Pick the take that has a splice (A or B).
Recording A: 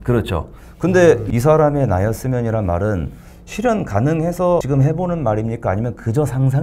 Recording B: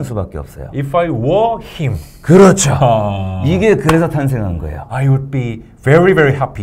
A